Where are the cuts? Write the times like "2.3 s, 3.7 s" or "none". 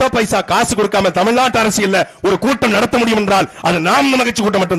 none